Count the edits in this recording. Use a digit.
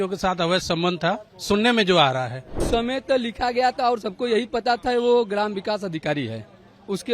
1